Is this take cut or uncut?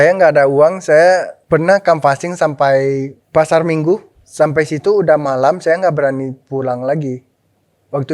uncut